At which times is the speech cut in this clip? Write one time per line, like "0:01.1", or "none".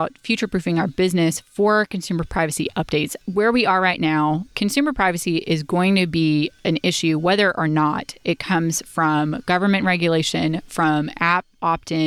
0:03.1
0:04.5